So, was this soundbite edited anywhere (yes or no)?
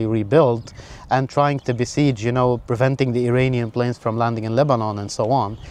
no